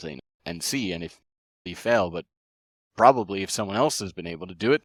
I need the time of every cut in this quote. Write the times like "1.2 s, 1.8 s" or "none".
none